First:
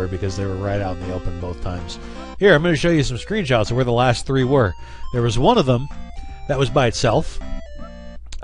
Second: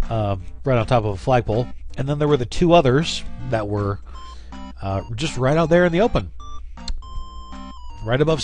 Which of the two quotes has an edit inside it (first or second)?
second